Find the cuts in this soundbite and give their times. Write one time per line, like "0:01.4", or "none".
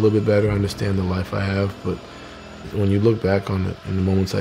0:02.6